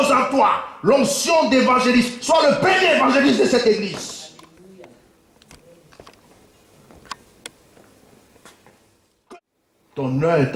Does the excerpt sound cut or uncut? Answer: cut